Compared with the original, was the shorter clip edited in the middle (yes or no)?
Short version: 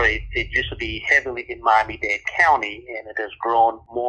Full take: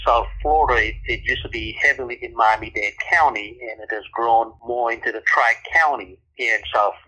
no